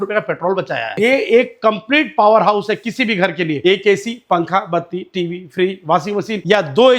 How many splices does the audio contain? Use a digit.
1